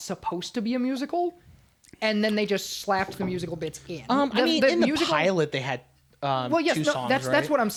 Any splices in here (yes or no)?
no